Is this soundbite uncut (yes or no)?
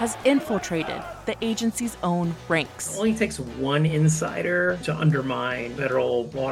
no